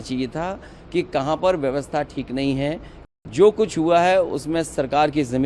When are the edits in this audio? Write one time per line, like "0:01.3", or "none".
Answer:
0:02.9